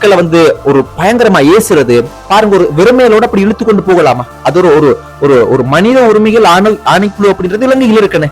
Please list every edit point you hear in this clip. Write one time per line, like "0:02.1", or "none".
0:02.2